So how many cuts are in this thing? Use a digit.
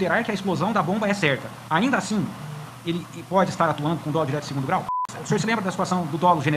2